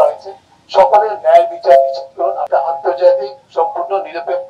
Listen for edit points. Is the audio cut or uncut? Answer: cut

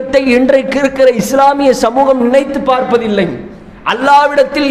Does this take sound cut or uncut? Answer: uncut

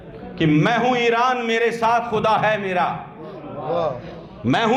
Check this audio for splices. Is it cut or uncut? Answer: uncut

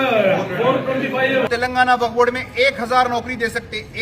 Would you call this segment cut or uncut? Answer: cut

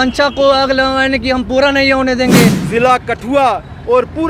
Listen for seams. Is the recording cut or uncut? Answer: cut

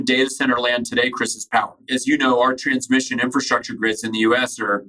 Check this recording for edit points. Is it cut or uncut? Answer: cut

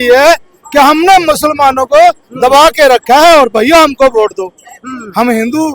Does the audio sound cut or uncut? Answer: uncut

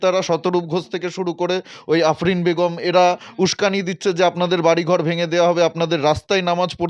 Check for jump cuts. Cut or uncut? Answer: uncut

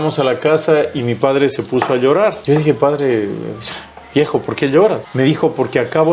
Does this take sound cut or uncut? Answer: cut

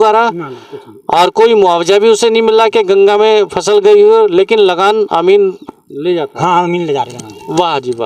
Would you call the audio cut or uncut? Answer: uncut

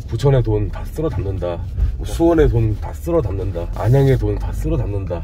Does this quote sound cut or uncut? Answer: uncut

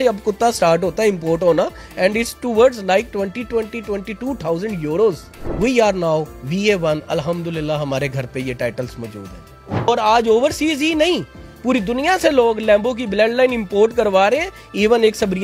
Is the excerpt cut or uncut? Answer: cut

